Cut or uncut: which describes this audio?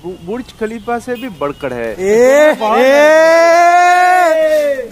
cut